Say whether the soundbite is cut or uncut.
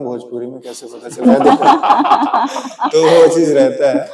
uncut